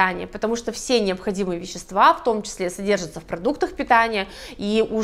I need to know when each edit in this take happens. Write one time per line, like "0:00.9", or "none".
none